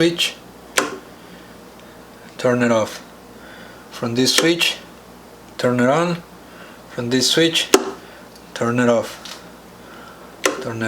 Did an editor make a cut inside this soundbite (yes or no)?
no